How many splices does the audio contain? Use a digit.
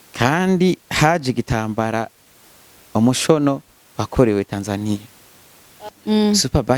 1